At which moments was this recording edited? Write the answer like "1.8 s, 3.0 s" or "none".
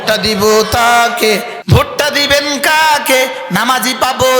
1.5 s